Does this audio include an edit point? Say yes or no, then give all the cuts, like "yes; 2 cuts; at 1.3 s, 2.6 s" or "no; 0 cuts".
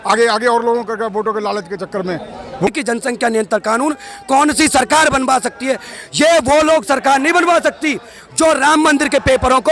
yes; 1 cut; at 2.7 s